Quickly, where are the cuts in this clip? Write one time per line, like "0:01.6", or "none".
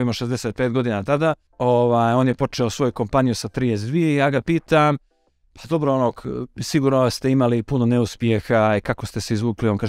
0:01.5